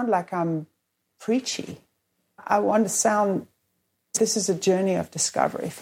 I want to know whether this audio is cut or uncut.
cut